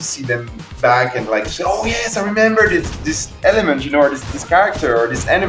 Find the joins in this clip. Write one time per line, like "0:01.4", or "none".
none

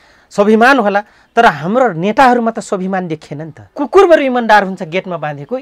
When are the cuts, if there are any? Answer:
0:03.7

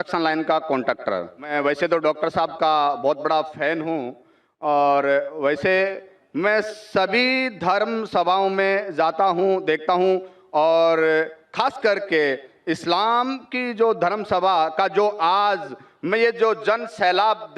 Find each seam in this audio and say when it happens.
0:01.5

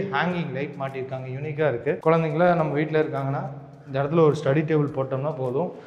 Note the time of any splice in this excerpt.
0:02.0

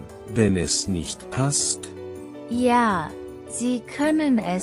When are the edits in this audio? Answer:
none

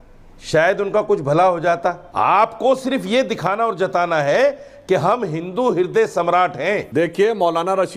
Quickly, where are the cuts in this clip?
0:02.0
0:06.9

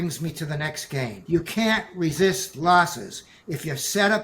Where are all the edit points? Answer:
0:01.2

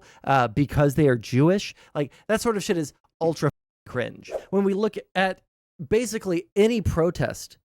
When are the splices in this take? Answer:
0:04.4

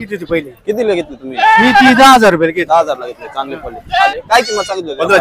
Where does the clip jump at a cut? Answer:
0:04.1

